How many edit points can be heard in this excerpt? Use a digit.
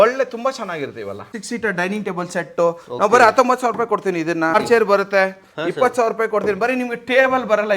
2